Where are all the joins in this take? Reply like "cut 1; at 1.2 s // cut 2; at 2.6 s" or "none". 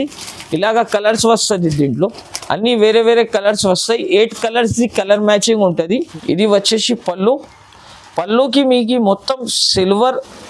cut 1; at 6.0 s